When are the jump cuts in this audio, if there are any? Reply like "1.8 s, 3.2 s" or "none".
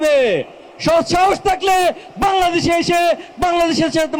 none